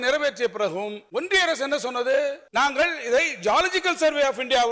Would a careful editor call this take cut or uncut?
cut